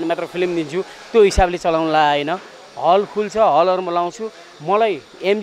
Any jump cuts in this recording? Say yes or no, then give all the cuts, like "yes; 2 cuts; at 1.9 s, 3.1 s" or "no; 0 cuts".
no; 0 cuts